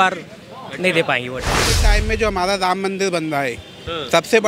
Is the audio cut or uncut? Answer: cut